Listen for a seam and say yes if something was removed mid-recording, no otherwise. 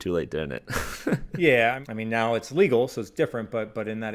yes